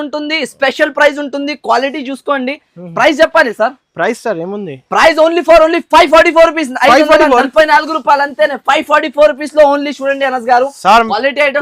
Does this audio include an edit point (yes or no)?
no